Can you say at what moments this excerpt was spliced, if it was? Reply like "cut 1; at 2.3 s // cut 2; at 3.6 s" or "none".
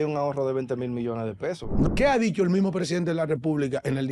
cut 1; at 1.9 s